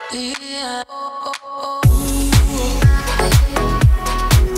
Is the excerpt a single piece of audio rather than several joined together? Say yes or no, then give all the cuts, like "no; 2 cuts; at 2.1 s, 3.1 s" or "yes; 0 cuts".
yes; 0 cuts